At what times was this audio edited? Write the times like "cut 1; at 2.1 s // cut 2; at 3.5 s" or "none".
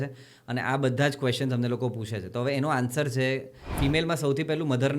cut 1; at 3.6 s